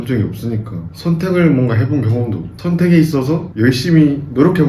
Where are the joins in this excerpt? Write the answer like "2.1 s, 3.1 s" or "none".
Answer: none